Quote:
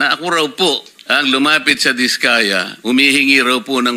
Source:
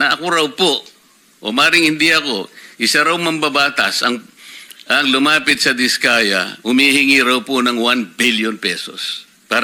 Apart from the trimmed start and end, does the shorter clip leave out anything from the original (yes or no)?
yes